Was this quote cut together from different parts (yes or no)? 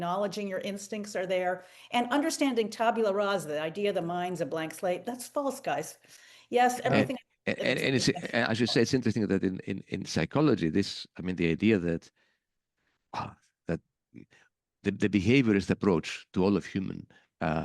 no